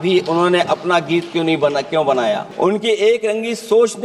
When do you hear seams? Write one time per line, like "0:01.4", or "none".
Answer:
0:02.5